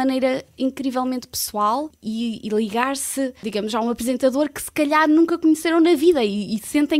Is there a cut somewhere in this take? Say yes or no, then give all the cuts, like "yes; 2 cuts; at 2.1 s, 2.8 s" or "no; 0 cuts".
yes; 2 cuts; at 2.0 s, 3.4 s